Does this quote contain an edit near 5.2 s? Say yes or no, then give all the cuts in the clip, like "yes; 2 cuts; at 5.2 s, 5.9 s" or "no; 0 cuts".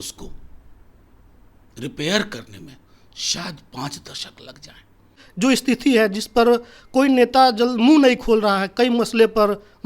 yes; 1 cut; at 5.2 s